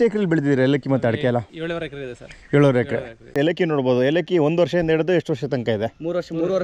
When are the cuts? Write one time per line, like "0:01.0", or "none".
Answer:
0:03.3